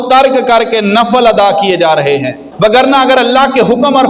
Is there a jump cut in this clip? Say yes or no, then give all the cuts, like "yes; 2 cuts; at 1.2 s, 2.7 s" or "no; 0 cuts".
yes; 1 cut; at 2.5 s